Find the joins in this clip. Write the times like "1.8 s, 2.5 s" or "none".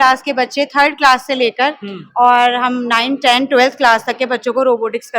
none